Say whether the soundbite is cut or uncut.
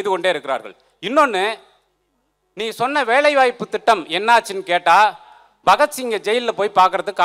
uncut